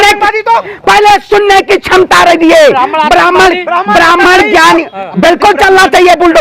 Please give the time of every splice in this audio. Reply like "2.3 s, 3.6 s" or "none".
5.1 s